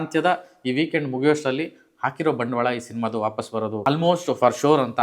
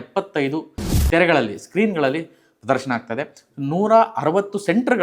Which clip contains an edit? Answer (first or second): first